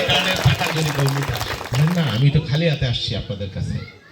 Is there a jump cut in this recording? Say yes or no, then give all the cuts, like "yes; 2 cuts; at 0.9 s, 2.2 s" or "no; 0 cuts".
yes; 1 cut; at 1.7 s